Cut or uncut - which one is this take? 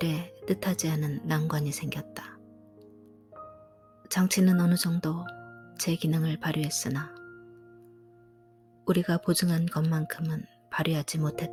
uncut